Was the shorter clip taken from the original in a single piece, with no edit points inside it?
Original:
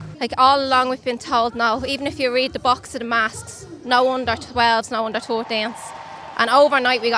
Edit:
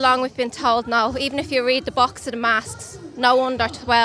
yes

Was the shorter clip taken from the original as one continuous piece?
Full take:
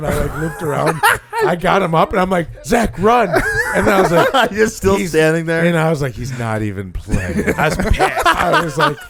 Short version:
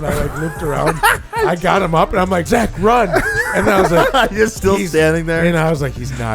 no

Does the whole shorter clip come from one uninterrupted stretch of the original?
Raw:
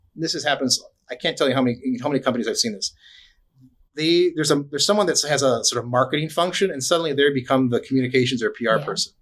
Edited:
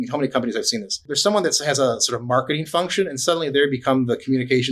no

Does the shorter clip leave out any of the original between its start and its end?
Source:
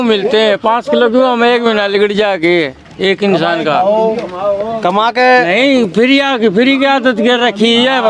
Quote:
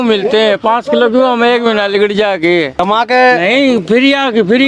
yes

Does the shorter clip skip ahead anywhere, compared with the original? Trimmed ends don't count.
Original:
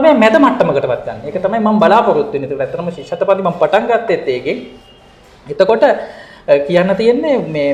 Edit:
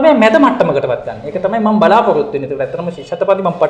no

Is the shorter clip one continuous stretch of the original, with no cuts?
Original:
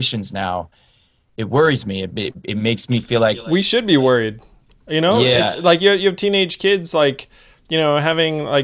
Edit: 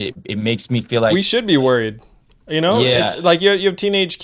no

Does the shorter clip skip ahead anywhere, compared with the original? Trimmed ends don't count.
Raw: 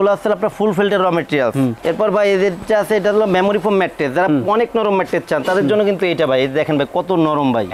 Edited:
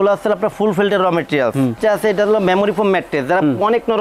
yes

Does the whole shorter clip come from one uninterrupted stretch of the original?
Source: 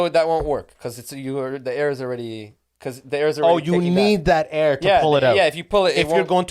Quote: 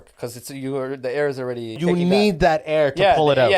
no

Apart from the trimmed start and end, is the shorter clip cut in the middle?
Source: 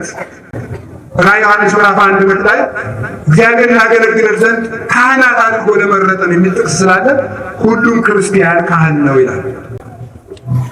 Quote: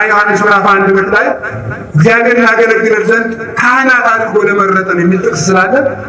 no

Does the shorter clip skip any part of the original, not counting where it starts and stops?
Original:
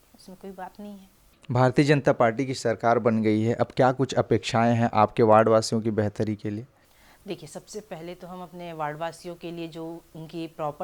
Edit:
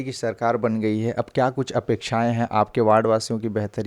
no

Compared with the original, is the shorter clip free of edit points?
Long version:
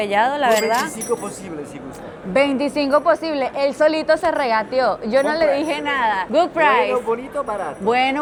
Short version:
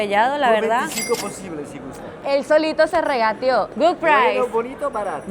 no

